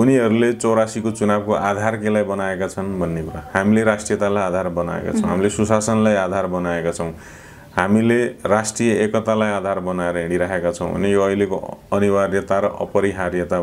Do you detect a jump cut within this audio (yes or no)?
no